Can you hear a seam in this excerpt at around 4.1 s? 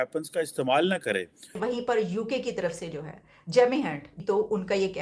yes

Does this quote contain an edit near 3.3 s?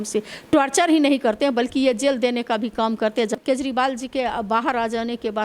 yes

